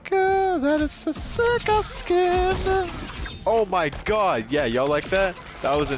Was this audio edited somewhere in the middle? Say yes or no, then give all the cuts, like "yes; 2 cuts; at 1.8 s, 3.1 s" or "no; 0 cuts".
no; 0 cuts